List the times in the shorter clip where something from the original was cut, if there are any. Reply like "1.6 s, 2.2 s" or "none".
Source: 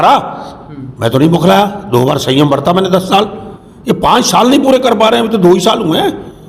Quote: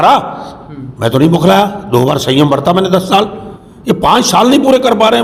none